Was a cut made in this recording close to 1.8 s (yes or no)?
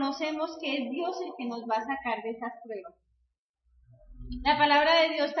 yes